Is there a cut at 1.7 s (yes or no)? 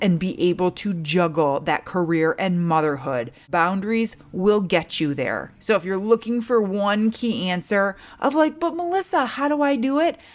no